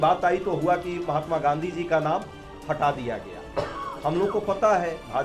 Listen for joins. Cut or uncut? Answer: uncut